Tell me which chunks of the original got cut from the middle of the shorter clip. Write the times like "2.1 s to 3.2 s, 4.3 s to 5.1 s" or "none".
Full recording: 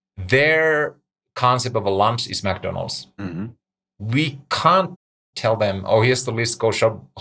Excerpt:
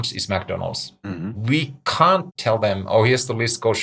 3.5 s to 4.0 s, 5.0 s to 5.3 s